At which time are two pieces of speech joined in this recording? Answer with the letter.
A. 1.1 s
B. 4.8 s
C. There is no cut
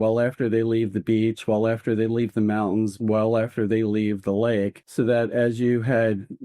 B